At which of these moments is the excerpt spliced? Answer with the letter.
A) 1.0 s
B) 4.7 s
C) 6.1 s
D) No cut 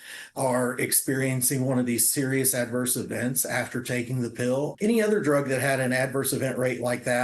B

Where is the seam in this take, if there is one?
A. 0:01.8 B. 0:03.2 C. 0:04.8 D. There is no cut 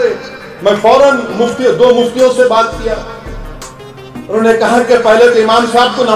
D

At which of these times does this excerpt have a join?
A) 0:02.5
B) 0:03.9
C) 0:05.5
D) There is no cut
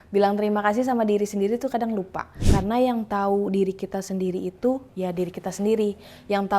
A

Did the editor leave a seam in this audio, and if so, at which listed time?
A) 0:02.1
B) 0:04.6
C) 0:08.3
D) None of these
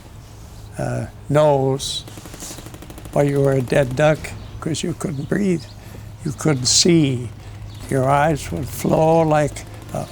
B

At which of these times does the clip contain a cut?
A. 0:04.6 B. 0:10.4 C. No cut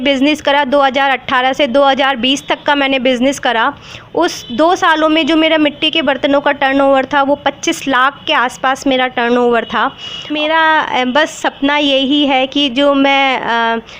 B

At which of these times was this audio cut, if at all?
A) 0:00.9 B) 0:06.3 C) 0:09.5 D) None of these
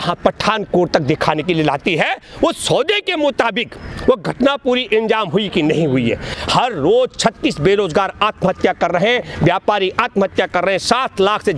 B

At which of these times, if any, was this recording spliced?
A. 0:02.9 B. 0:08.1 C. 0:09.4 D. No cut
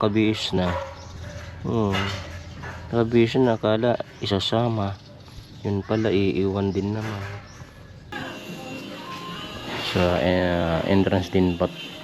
B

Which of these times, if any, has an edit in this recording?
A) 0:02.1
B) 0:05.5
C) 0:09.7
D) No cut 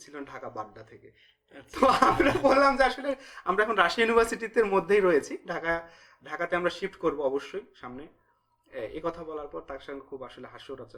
D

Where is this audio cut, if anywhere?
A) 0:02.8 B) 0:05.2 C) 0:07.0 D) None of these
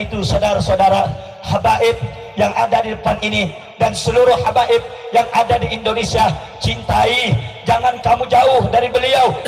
D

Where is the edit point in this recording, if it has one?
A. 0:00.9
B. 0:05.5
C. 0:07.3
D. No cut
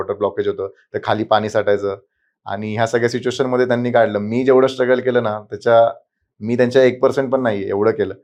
D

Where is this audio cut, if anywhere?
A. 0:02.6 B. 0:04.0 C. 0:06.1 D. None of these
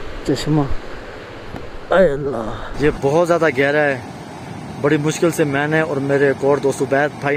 A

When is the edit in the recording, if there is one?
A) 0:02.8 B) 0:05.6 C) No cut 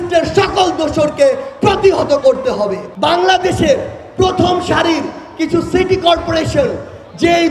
A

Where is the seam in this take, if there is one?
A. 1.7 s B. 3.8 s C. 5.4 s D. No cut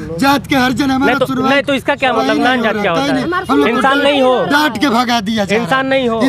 D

